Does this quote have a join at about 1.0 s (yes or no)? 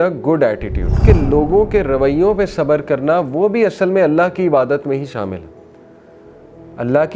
yes